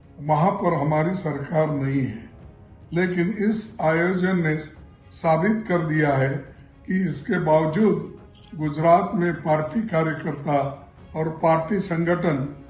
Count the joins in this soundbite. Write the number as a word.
zero